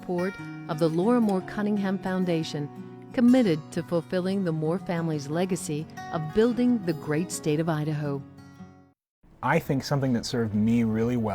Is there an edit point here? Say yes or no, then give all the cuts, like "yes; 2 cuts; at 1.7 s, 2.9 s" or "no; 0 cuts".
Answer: yes; 1 cut; at 9.3 s